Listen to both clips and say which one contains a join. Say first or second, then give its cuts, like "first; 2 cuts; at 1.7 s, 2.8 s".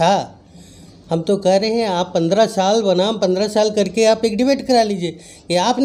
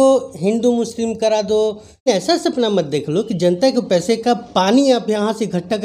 second; 1 cut; at 2.1 s